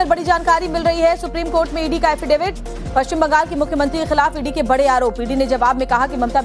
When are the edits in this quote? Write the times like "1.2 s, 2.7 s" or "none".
1.5 s